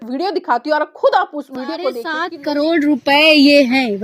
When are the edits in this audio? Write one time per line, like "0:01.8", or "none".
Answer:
0:02.1